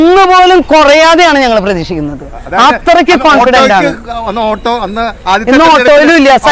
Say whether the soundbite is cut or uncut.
uncut